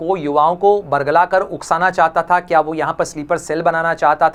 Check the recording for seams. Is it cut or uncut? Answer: uncut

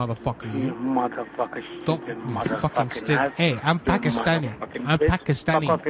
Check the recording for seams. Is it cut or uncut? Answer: uncut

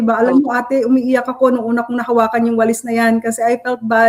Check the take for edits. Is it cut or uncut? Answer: uncut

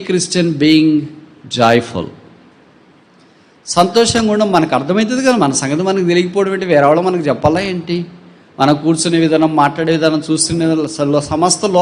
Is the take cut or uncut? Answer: uncut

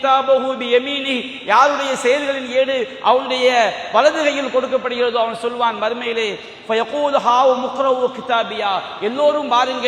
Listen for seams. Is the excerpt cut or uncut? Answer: uncut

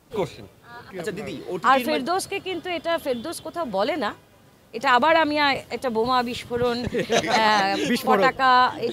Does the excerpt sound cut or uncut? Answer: cut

